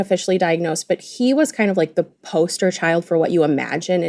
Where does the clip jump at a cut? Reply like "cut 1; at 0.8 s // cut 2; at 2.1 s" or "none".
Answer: none